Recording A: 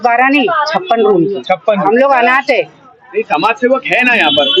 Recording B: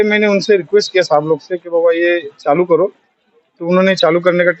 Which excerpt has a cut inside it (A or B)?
A